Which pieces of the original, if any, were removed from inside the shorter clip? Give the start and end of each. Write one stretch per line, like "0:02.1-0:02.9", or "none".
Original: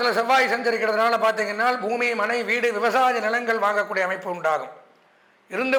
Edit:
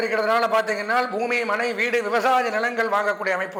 none